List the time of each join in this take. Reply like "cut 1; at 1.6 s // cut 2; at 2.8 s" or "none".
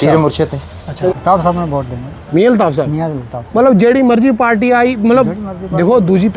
cut 1; at 1.2 s